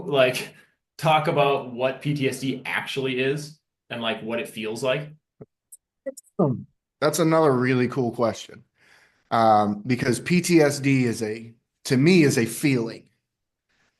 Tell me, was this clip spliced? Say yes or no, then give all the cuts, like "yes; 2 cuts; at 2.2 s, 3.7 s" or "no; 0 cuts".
no; 0 cuts